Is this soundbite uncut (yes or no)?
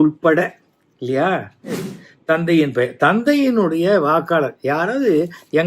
no